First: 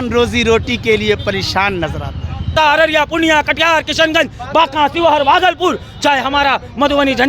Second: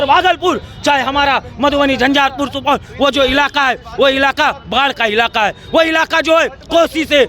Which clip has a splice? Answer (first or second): first